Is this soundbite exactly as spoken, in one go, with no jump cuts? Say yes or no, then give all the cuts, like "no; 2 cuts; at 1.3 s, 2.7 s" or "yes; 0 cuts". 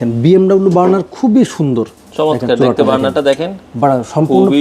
yes; 0 cuts